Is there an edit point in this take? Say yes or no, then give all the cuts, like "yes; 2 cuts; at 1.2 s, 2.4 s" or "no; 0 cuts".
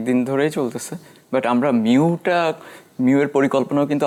no; 0 cuts